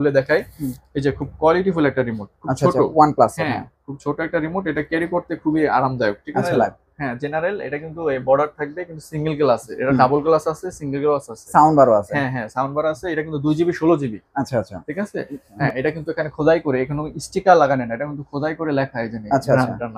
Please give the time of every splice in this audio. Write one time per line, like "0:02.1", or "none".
0:06.5
0:15.5